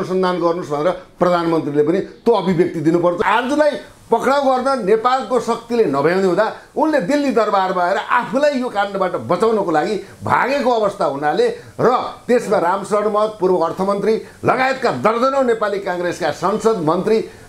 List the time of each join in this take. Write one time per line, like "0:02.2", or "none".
0:03.2

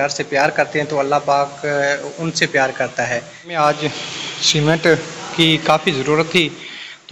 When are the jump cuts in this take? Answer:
0:03.4

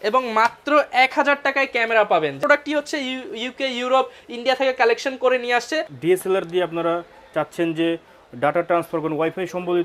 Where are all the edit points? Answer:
0:02.4
0:05.9

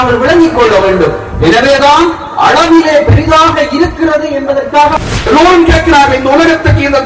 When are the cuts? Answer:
0:05.0

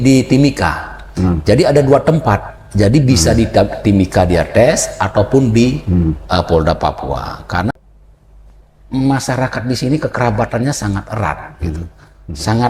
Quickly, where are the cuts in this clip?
0:07.7

